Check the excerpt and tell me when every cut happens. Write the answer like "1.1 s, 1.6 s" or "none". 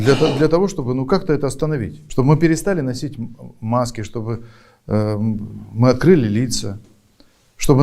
2.0 s